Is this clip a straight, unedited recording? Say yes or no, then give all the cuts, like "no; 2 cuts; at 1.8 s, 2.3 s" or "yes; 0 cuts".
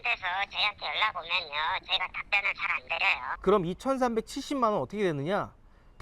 no; 1 cut; at 3.3 s